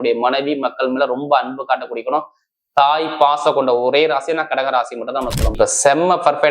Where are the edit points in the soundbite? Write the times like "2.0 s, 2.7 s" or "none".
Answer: 5.6 s